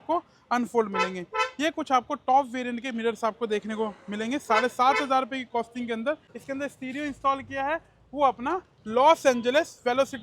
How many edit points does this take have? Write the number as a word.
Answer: one